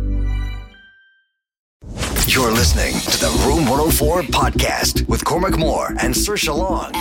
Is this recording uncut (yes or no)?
no